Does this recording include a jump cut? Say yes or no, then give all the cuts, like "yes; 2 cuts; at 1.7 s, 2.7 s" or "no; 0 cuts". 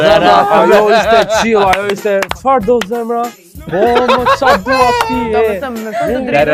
no; 0 cuts